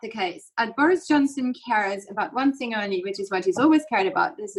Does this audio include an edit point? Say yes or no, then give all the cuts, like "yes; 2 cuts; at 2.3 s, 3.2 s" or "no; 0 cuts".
no; 0 cuts